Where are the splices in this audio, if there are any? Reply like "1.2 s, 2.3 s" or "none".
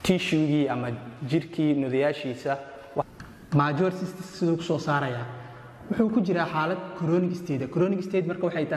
3.0 s